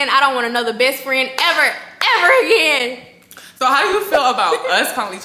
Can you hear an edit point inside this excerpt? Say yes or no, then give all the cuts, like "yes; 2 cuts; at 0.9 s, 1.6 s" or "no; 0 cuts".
no; 0 cuts